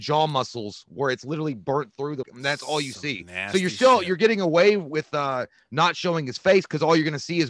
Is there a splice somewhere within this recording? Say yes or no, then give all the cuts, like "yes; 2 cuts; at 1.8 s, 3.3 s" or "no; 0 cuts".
yes; 1 cut; at 2.3 s